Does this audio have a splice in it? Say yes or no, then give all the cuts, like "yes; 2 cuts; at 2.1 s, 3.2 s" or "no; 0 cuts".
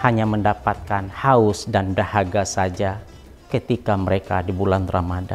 no; 0 cuts